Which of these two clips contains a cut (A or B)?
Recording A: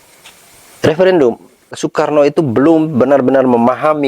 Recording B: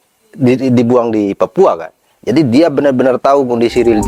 A